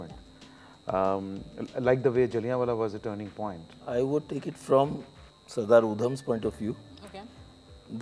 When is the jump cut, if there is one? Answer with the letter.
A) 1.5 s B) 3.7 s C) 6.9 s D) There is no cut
B